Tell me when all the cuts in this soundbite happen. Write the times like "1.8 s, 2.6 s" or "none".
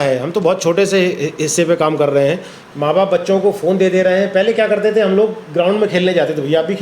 2.5 s

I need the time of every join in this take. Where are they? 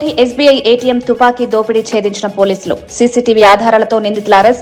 none

